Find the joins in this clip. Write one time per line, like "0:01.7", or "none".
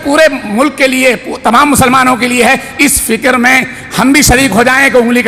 none